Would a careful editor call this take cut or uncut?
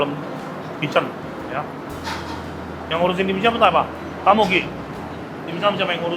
uncut